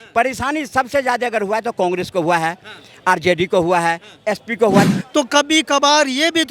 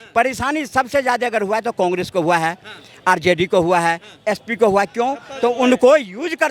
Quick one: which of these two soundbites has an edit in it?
first; 1 cut; at 4.9 s

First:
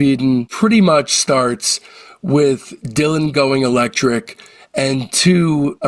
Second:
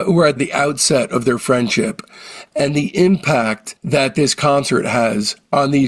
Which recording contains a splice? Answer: second; 1 cut; at 2.4 s

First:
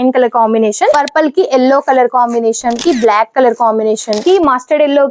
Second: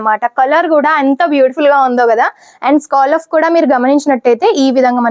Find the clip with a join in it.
first; 3 cuts; at 0.9 s, 2.8 s, 4.2 s

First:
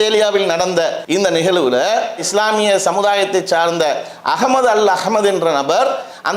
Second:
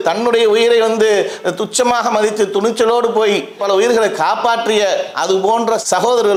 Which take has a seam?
first; 1 cut; at 1.0 s

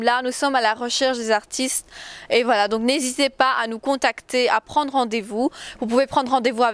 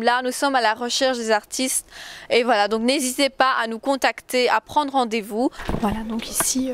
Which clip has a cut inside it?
second; 1 cut; at 5.6 s

